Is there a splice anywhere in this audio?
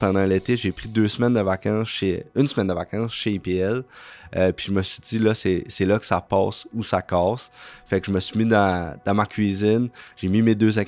no; 0 cuts

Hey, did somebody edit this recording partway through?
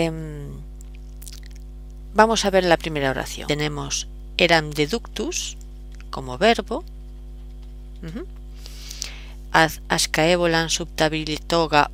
no; 0 cuts

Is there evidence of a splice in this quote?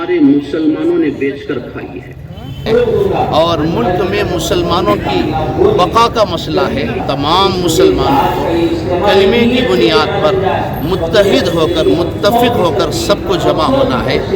yes; 2 cuts; at 2.6 s, 7.0 s

